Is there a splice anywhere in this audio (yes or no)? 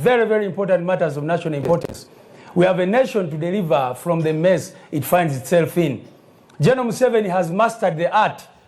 yes